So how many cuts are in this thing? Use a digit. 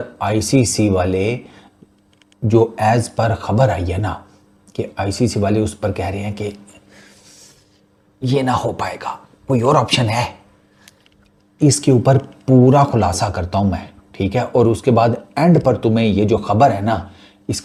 0